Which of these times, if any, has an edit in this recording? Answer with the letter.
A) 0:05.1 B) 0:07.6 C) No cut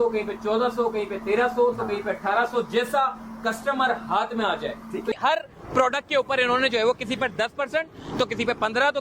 A